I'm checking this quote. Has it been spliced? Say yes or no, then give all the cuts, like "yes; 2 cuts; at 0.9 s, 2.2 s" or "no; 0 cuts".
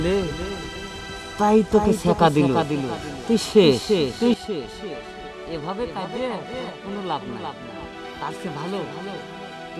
no; 0 cuts